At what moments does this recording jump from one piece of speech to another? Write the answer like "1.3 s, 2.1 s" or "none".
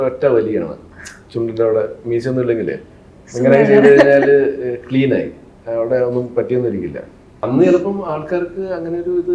7.3 s